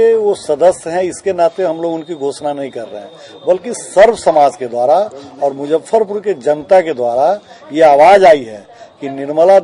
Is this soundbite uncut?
yes; 0 cuts

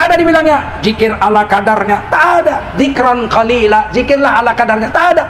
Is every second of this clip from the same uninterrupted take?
yes; 0 cuts

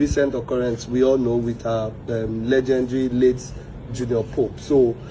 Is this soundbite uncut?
yes; 0 cuts

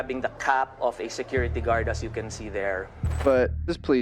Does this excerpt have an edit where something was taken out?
yes; 1 cut; at 3.0 s

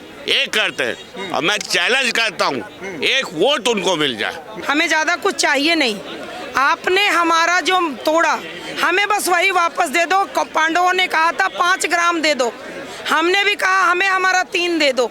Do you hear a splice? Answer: yes; 1 cut; at 4.4 s

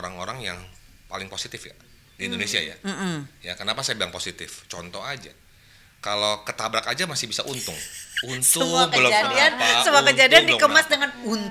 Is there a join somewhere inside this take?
no; 0 cuts

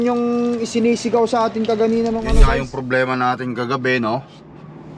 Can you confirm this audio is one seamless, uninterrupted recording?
no; 1 cut; at 2.5 s

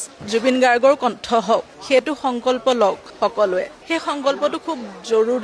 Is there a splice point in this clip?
yes; 1 cut; at 3.8 s

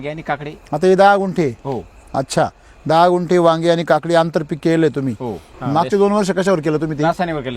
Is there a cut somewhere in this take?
yes; 1 cut; at 5.5 s

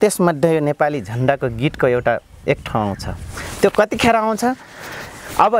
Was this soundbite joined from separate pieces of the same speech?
no; 0 cuts

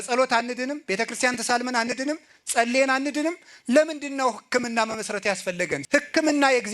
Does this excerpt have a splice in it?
yes; 1 cut; at 5.8 s

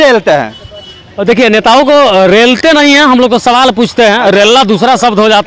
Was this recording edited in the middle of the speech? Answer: no; 0 cuts

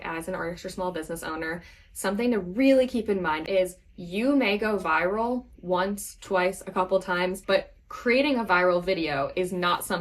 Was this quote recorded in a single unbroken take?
no; 2 cuts; at 3.4 s, 7.4 s

